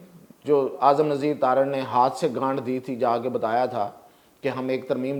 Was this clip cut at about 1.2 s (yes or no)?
no